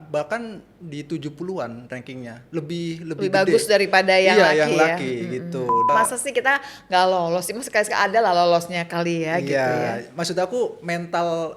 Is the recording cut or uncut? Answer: cut